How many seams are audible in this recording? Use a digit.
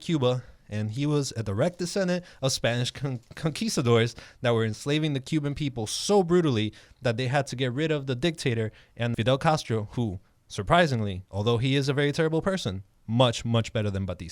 1